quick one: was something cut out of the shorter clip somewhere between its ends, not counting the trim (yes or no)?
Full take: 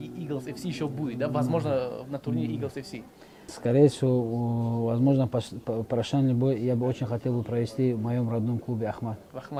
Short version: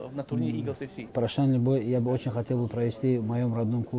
yes